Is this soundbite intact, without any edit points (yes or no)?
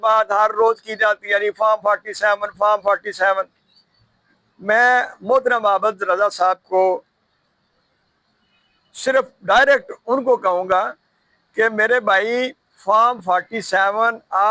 yes